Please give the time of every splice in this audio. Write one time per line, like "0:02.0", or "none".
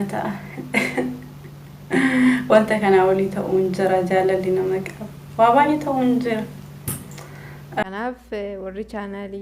0:07.8